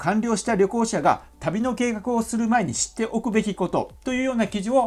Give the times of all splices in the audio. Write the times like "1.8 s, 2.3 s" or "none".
none

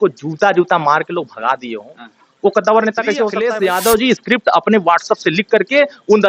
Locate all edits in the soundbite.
3.3 s

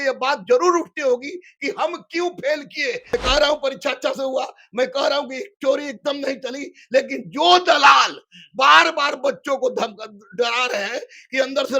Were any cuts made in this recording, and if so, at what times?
3.0 s

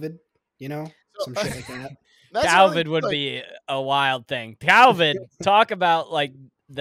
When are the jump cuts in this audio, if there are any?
none

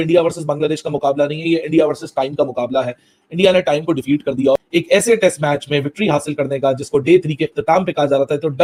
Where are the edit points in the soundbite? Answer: none

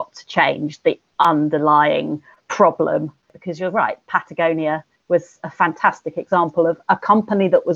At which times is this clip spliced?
3.2 s

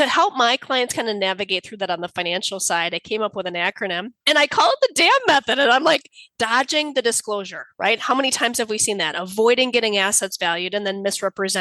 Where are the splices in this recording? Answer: 4.1 s, 6.3 s

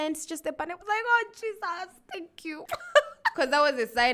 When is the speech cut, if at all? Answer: 2.6 s, 3.3 s

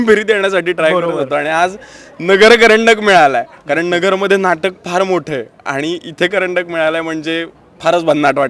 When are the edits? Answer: none

